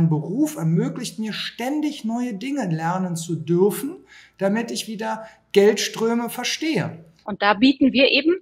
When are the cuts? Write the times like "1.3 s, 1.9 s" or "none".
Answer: 7.3 s